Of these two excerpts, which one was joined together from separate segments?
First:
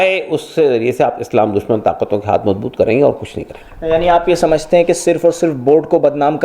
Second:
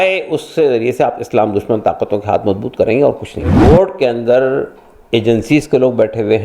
second; 1 cut; at 3.5 s

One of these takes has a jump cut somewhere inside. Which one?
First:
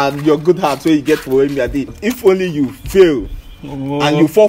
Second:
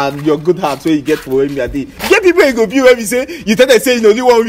first; 1 cut; at 2.0 s

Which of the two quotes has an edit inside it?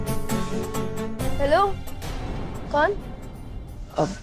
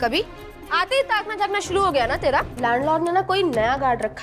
second; 1 cut; at 2.5 s

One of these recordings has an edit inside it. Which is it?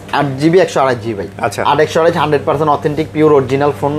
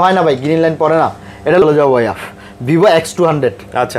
second; 1 cut; at 1.6 s

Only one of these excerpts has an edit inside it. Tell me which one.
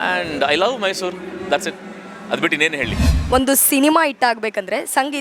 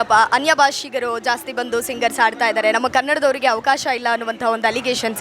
first; 1 cut; at 3.1 s

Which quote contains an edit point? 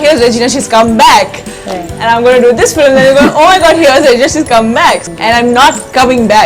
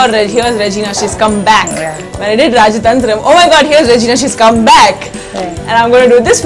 first; 1 cut; at 5.0 s

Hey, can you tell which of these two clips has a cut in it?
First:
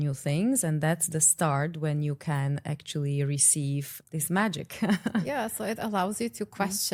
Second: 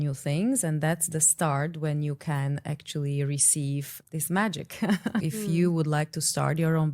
second; 1 cut; at 5.2 s

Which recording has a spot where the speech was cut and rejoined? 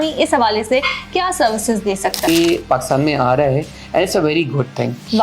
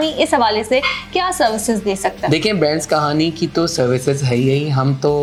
first; 1 cut; at 2.3 s

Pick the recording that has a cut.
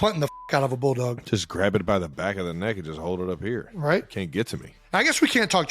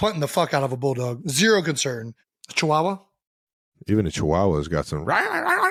first; 2 cuts; at 1.2 s, 4.7 s

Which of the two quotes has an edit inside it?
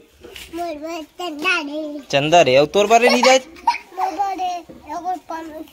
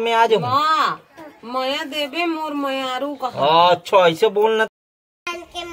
second; 1 cut; at 4.7 s

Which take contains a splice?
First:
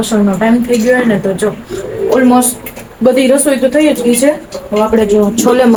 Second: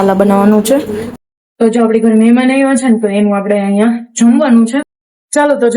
second; 2 cuts; at 1.1 s, 4.8 s

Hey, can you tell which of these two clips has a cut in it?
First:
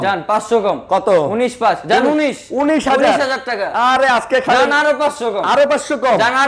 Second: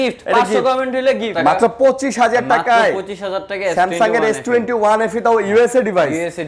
second; 1 cut; at 1.3 s

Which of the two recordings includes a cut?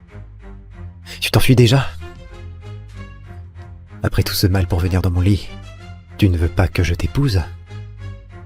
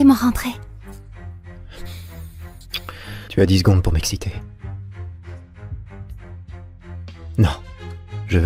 first; 3 cuts; at 1.3 s, 1.9 s, 3.7 s

